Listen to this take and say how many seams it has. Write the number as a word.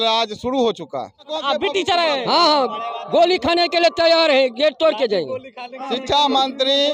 two